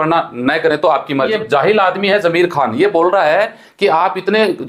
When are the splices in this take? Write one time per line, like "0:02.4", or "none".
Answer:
0:01.3